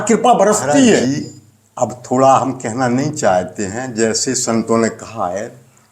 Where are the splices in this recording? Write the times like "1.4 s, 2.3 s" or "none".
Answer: 1.0 s